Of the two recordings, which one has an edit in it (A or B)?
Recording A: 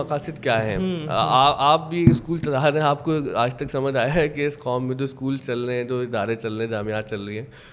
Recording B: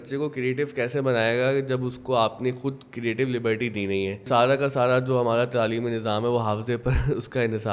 B